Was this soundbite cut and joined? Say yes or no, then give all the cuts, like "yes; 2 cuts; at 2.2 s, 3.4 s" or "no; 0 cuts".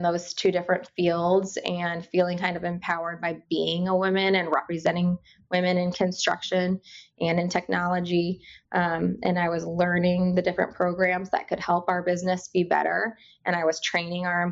no; 0 cuts